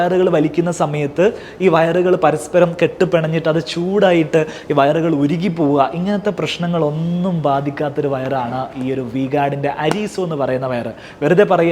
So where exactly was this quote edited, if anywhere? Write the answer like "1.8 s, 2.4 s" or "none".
none